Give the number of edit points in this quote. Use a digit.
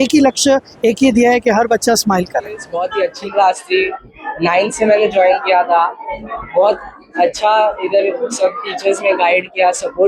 1